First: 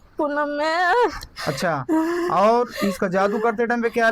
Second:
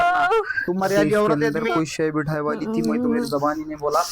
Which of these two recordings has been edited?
second; 1 cut; at 1.5 s

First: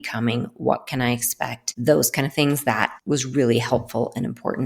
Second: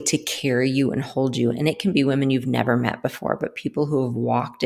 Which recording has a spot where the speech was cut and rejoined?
first; 2 cuts; at 1.7 s, 2.9 s

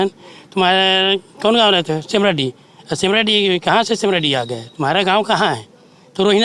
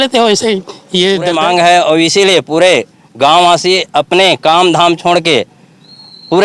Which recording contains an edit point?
second; 1 cut; at 1.3 s

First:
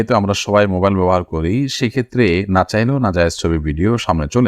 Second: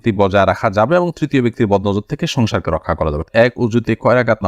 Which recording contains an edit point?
second; 1 cut; at 3.2 s

